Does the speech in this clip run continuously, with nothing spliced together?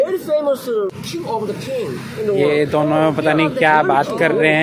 no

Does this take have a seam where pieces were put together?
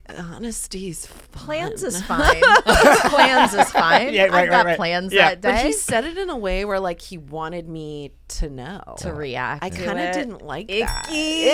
no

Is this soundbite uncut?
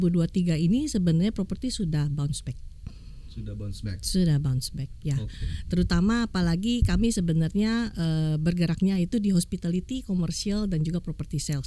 yes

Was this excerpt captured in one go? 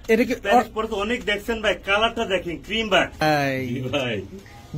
no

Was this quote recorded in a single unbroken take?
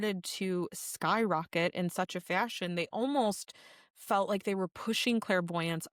yes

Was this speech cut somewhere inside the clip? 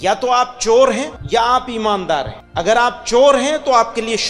yes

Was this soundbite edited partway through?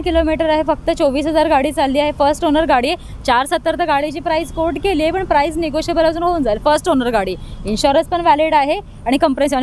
no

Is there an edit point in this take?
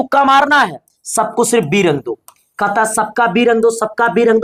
no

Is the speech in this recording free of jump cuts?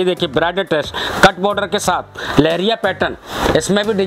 yes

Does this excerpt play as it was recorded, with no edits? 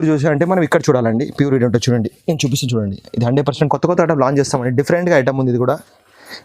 no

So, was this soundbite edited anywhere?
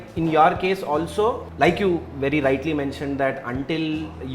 yes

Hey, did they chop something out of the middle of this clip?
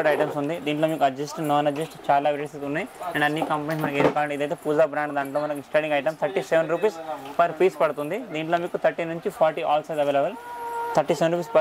no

